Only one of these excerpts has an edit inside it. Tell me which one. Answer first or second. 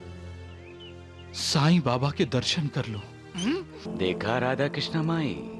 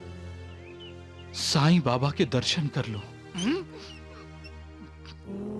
first